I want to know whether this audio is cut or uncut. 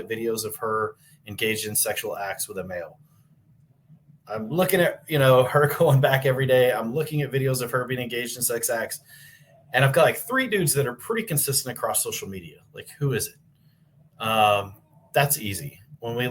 uncut